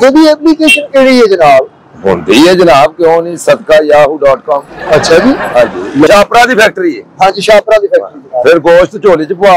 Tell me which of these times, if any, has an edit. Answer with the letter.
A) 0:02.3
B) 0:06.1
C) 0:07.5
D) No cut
B